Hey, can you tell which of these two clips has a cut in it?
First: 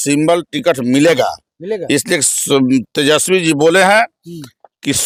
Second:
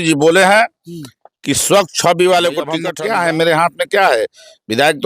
second; 1 cut; at 2.8 s

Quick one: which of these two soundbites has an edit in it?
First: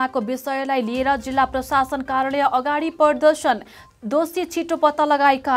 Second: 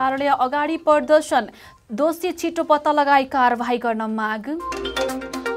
second; 1 cut; at 4.7 s

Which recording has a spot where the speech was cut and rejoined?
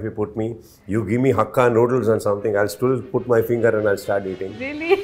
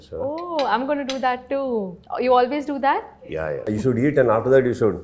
second; 1 cut; at 3.6 s

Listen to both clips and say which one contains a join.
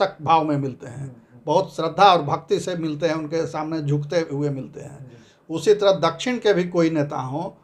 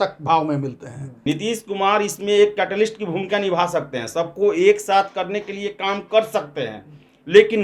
second; 1 cut; at 1.2 s

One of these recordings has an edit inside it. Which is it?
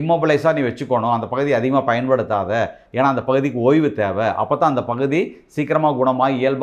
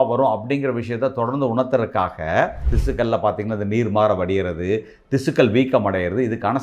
second; 1 cut; at 2.7 s

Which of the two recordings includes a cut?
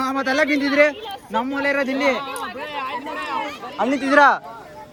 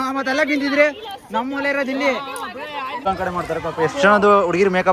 second; 1 cut; at 3.1 s

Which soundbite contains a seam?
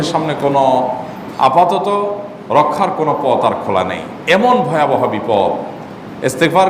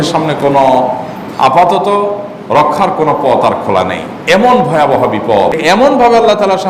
second; 1 cut; at 5.6 s

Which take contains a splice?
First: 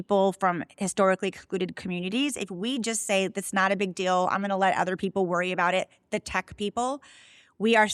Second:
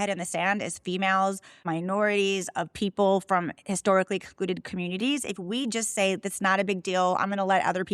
second; 1 cut; at 1.6 s

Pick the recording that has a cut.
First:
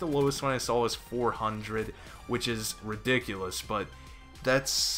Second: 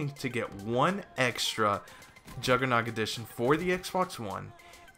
first; 1 cut; at 1.2 s

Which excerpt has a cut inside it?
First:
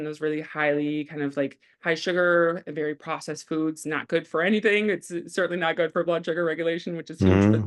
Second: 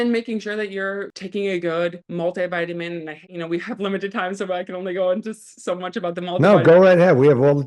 second; 3 cuts; at 1.1 s, 2.0 s, 3.2 s

